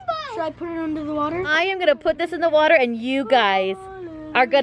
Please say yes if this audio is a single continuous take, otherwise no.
yes